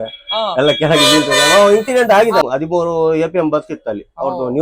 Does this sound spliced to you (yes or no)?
yes